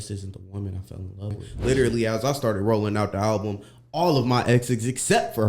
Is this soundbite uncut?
no; 1 cut; at 1.5 s

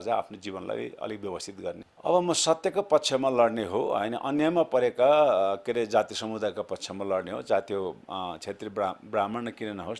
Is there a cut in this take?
yes; 1 cut; at 1.8 s

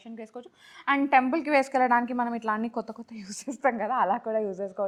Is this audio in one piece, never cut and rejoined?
yes; 0 cuts

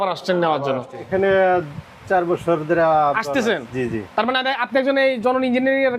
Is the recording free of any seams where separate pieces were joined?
no; 1 cut; at 1.0 s

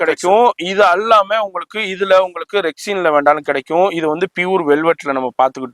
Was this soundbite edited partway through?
no; 0 cuts

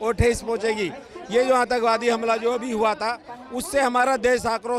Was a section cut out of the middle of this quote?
no; 0 cuts

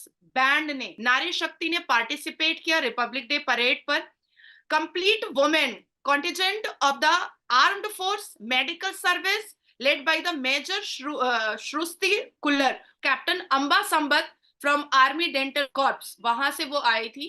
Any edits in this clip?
yes; 1 cut; at 15.7 s

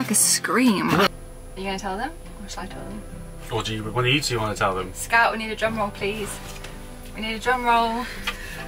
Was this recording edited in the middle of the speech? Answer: yes; 1 cut; at 1.1 s

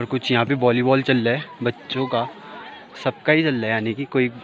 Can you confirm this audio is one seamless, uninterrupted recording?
yes; 0 cuts

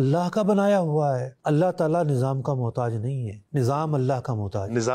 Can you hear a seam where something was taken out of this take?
yes; 1 cut; at 1.3 s

